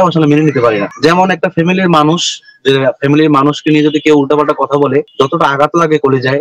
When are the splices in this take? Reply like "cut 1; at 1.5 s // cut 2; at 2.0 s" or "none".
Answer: none